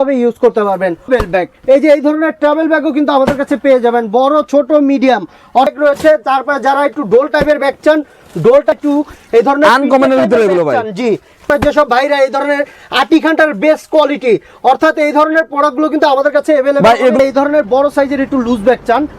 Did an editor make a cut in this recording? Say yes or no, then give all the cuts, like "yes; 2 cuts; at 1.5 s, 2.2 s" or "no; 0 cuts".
yes; 5 cuts; at 1.1 s, 5.7 s, 8.7 s, 11.4 s, 17.2 s